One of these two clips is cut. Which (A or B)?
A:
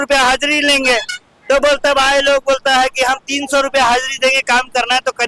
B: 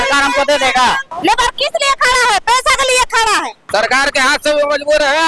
B